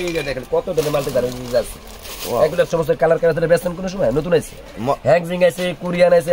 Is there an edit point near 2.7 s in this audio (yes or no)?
yes